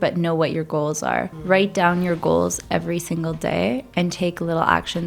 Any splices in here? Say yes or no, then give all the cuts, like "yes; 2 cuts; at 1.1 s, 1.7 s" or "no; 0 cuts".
yes; 1 cut; at 1.3 s